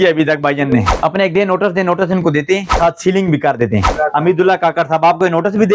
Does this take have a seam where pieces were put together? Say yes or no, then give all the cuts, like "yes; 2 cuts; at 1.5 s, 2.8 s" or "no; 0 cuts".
yes; 3 cuts; at 0.9 s, 2.7 s, 3.9 s